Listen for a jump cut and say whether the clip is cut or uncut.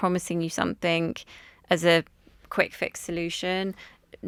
uncut